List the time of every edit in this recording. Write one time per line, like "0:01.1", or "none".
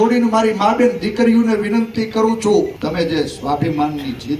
0:02.8